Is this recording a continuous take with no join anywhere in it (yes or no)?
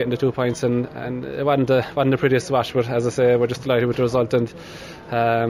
yes